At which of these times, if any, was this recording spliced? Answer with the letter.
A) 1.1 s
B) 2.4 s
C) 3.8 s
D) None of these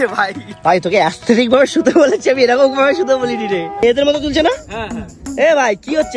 C